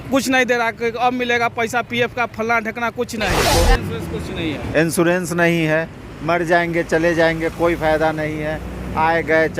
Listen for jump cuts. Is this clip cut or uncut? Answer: cut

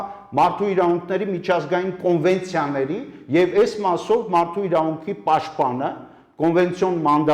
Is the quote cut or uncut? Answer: uncut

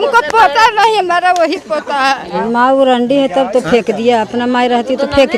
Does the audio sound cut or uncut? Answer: cut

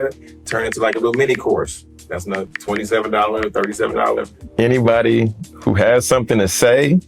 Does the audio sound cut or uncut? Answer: cut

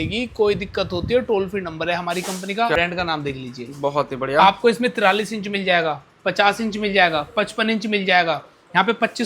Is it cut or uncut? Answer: cut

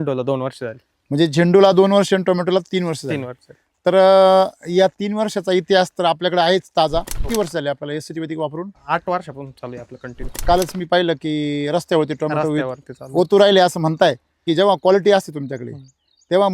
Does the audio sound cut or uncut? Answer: cut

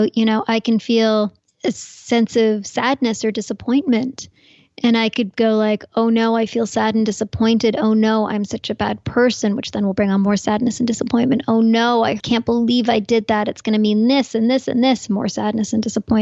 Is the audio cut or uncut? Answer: cut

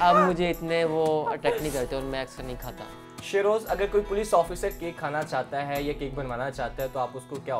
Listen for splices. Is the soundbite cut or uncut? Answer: uncut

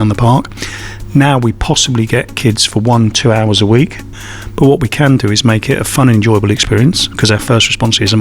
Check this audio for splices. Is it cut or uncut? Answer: cut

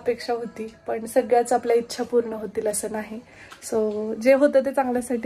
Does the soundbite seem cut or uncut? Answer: uncut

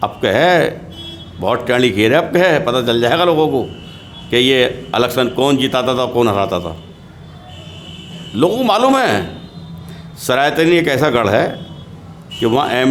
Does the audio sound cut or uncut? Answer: uncut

